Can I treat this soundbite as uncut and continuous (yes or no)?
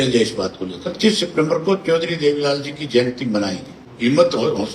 no